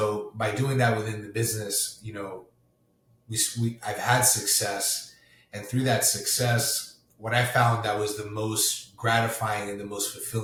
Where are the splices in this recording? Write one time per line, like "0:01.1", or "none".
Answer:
none